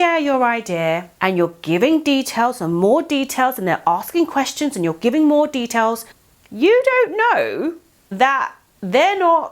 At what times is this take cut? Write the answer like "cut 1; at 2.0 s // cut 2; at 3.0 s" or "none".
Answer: cut 1; at 1.1 s